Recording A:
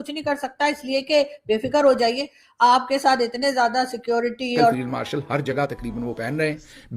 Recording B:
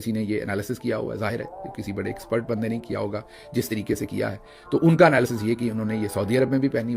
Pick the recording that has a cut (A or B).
A